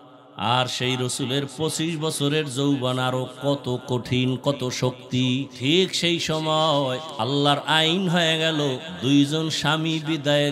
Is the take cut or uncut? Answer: cut